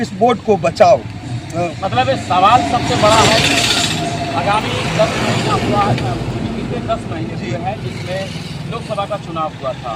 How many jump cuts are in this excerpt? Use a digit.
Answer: 0